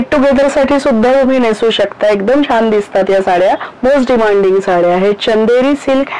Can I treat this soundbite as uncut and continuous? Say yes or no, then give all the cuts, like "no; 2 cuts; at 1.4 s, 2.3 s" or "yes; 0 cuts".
no; 1 cut; at 3.7 s